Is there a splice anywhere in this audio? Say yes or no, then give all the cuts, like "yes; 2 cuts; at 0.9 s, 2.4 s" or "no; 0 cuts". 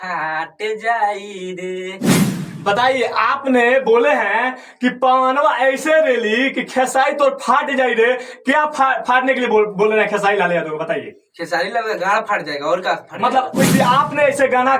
yes; 2 cuts; at 2.1 s, 13.6 s